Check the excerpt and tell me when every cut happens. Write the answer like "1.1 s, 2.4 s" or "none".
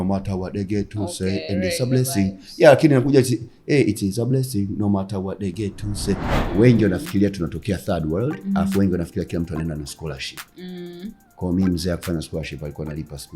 6.3 s